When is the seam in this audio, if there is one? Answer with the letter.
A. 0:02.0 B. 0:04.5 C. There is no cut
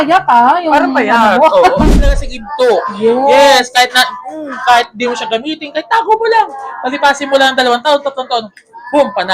A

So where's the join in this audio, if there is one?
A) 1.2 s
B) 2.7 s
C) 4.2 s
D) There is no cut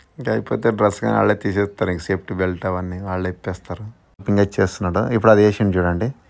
C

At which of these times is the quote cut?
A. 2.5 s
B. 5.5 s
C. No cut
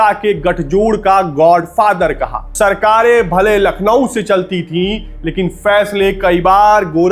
A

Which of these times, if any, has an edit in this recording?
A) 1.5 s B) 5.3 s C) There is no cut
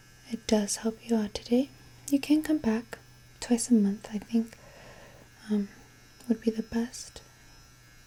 C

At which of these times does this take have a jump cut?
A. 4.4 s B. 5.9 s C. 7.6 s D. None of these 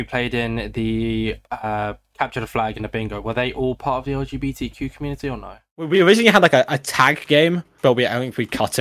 B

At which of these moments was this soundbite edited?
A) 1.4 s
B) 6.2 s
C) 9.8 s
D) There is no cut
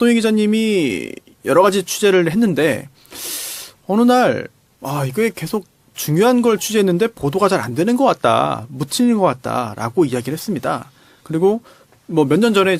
D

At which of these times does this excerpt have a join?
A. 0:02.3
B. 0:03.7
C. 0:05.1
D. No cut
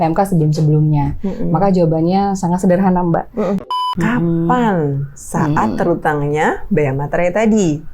B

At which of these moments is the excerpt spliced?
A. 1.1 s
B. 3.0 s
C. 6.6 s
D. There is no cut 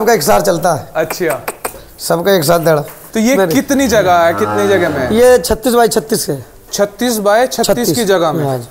B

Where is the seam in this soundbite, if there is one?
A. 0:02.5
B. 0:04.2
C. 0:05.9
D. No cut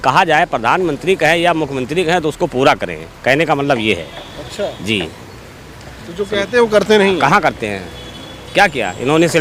D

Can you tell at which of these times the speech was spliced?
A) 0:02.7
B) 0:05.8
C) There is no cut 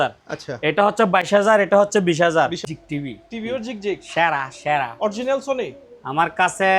A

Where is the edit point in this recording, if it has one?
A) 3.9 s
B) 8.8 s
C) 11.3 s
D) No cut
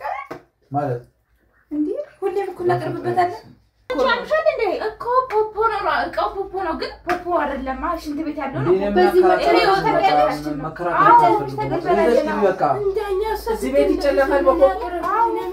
A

